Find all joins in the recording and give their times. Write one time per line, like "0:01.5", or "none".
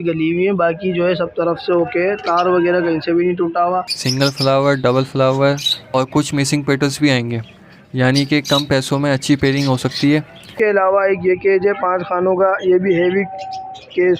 0:04.0
0:10.5